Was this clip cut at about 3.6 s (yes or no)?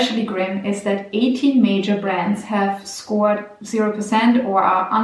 no